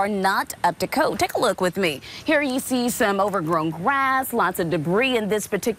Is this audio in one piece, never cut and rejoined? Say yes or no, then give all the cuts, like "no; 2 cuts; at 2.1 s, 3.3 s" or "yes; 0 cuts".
yes; 0 cuts